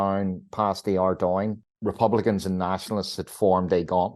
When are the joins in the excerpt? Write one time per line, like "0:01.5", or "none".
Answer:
0:01.7